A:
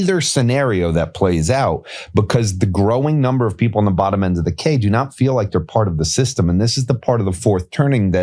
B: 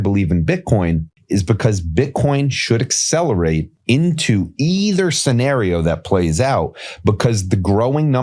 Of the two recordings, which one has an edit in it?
B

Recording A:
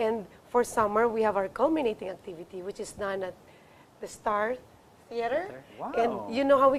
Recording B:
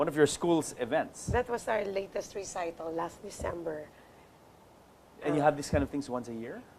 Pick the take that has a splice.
B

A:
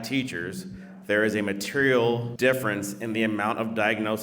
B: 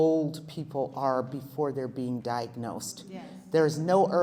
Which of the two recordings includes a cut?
A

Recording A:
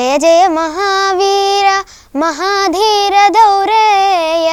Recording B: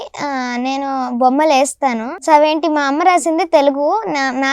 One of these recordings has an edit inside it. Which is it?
B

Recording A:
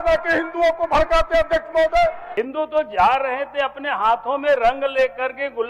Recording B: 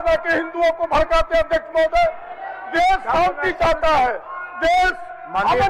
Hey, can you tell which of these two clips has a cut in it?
A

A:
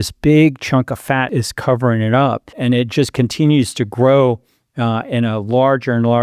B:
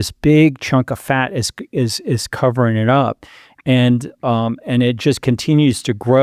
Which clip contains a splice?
A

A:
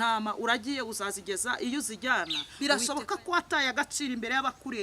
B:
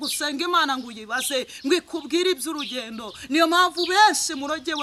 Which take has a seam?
A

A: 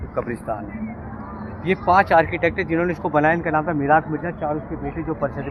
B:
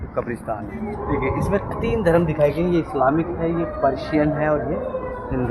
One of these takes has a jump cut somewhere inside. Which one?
B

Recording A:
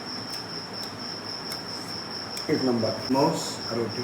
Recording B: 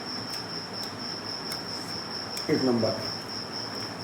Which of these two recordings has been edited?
A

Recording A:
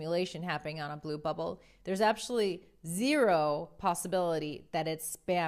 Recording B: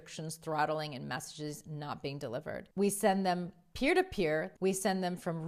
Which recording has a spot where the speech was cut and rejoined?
B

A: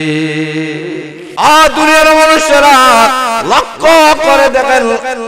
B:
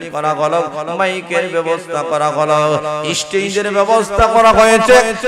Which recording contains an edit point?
A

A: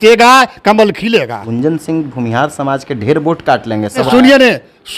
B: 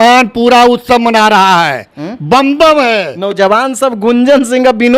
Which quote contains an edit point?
A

